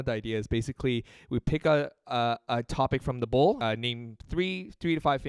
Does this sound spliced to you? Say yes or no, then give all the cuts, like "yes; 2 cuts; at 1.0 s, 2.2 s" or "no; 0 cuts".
yes; 1 cut; at 3.6 s